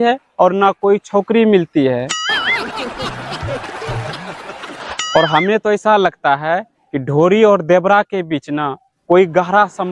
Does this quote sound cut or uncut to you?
cut